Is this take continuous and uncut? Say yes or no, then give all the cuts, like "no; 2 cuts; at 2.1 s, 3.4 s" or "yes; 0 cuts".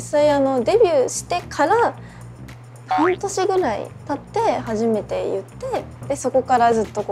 yes; 0 cuts